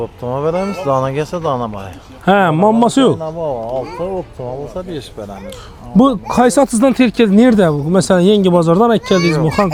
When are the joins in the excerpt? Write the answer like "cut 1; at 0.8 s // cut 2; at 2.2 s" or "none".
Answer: none